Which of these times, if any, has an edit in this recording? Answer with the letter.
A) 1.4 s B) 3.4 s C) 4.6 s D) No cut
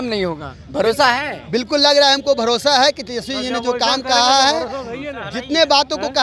D